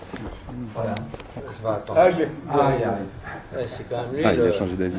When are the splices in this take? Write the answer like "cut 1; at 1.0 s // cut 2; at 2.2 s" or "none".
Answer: cut 1; at 2.4 s